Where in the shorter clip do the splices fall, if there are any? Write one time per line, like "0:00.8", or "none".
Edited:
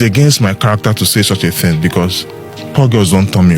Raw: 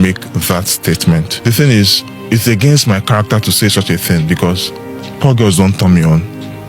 none